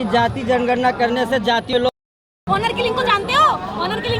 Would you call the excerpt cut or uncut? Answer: cut